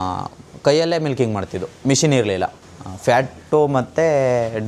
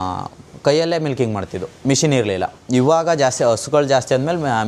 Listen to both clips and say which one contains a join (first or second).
first